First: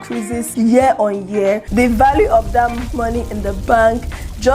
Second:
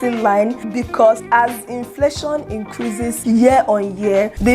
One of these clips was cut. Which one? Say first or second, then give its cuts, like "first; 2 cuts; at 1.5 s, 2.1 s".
second; 1 cut; at 1.2 s